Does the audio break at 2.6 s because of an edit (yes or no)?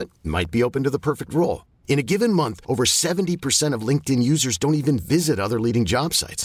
no